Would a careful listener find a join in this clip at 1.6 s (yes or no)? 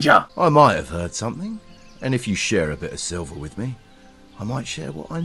no